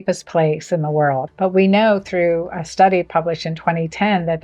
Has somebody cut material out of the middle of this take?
yes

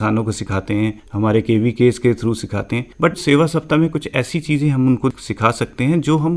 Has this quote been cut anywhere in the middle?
no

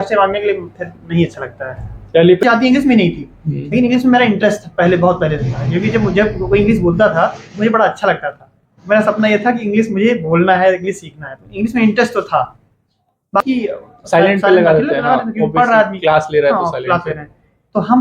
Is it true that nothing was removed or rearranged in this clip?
no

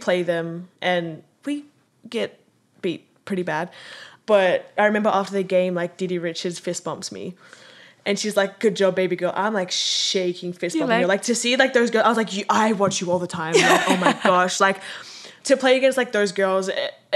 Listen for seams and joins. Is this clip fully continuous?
no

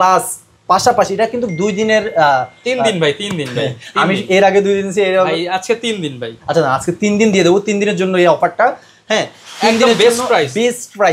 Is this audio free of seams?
yes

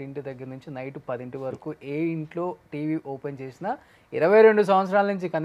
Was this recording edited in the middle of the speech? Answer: no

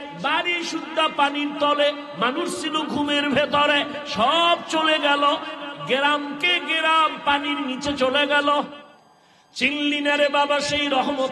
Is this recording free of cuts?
no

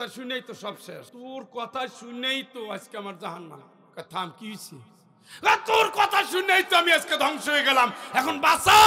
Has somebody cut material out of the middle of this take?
yes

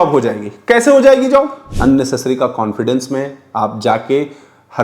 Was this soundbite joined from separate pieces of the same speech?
yes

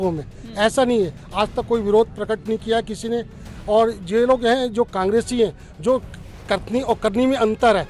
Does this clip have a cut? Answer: no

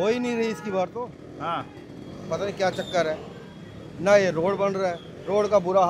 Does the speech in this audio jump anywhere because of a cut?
no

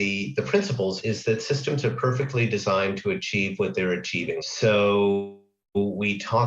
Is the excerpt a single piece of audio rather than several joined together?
no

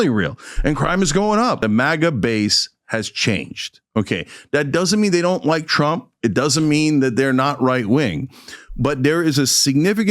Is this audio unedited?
no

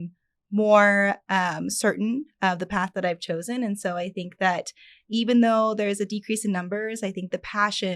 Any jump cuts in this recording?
no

